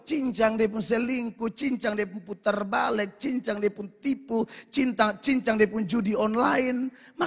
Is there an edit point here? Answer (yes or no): no